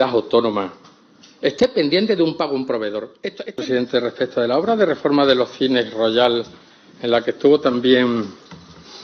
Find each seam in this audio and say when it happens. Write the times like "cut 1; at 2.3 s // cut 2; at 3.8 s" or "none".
cut 1; at 3.6 s